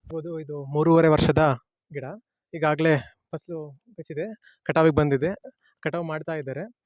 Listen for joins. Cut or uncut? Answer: uncut